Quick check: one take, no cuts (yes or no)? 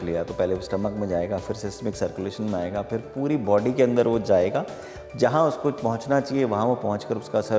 yes